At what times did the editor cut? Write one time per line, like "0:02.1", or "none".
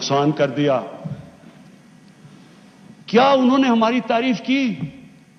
none